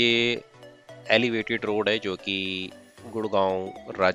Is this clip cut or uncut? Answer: uncut